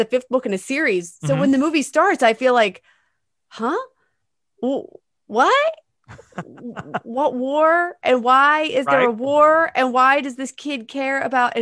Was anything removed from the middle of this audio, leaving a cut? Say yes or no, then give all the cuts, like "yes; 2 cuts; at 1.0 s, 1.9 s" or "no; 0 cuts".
no; 0 cuts